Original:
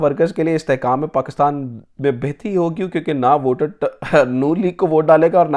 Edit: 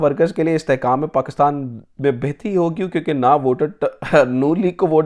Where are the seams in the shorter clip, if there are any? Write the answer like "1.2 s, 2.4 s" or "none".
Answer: none